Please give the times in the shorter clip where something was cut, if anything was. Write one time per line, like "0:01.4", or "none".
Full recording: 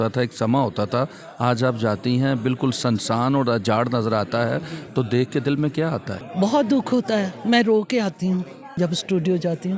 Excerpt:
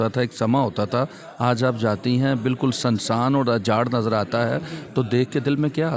none